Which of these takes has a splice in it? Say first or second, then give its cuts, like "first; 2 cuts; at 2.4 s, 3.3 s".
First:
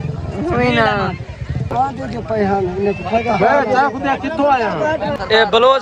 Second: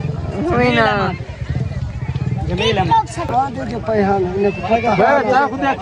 first; 1 cut; at 1.7 s